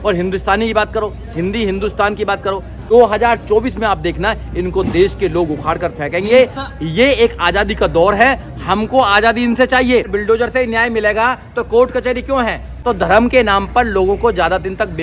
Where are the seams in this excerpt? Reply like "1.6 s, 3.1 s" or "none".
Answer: 2.7 s, 10.1 s, 12.7 s